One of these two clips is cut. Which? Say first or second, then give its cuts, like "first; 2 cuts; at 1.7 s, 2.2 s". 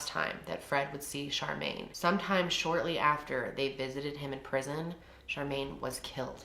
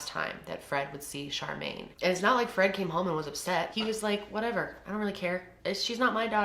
second; 3 cuts; at 1.9 s, 3.7 s, 5.5 s